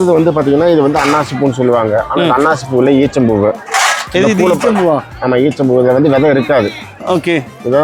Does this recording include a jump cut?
no; 0 cuts

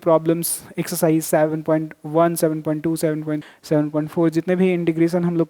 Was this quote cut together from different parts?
yes; 1 cut; at 3.4 s

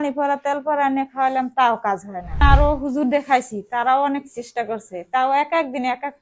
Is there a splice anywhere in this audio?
yes; 1 cut; at 2.4 s

